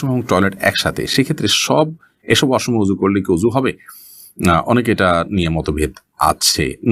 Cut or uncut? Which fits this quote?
uncut